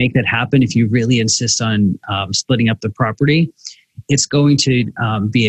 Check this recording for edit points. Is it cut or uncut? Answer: uncut